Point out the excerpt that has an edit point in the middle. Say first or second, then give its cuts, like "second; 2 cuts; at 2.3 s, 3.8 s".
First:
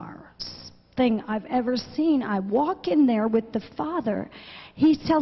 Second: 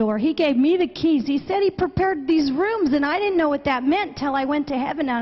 second; 1 cut; at 1.2 s